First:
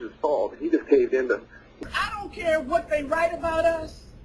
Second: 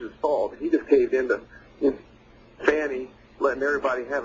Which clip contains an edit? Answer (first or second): second